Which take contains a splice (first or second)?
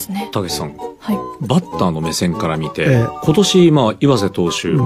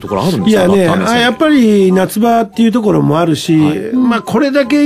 first